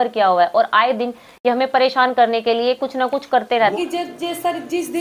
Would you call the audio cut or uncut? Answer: cut